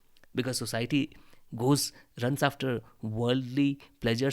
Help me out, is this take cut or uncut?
uncut